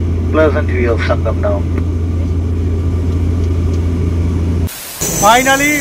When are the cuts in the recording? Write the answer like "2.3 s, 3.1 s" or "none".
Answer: 4.9 s